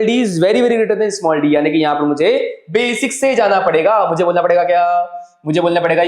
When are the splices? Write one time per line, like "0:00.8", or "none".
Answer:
none